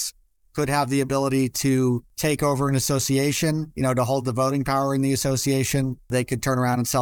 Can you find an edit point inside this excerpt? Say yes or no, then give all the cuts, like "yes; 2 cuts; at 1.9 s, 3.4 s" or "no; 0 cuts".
yes; 2 cuts; at 2.1 s, 6.1 s